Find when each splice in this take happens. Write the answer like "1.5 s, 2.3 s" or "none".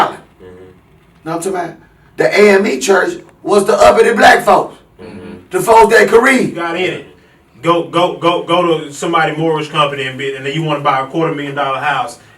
6.6 s